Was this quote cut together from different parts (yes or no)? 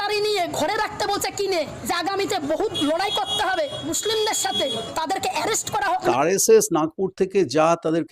yes